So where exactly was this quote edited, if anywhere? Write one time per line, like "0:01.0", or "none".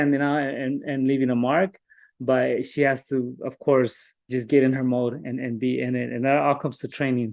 none